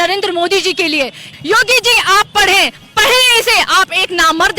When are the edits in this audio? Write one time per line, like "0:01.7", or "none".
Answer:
0:01.3

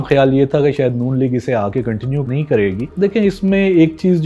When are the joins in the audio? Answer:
0:02.8

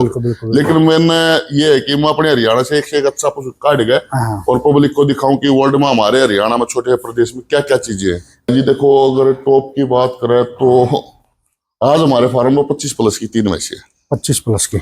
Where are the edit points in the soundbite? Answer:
0:08.5

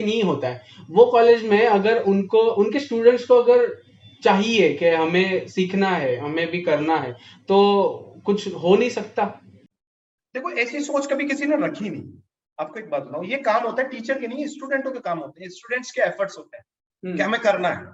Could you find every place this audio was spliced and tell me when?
none

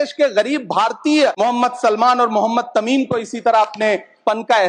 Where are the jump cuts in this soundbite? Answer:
0:01.3

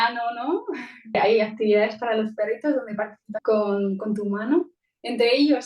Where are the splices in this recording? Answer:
0:01.1
0:03.3

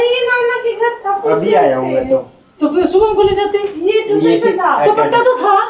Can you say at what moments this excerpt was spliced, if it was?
none

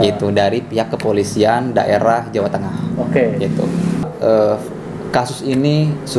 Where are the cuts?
0:04.1

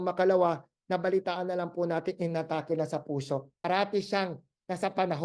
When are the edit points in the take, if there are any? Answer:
0:03.5

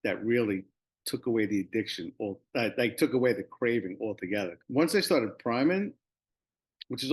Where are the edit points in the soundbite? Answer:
0:04.6

